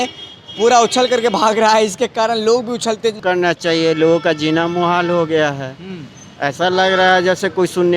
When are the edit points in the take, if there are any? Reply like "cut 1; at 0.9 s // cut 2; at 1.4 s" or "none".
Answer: cut 1; at 3.2 s